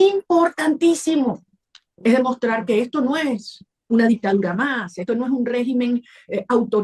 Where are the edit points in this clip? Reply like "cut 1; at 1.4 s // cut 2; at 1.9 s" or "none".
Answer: none